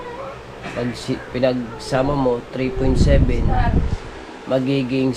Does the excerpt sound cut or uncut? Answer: uncut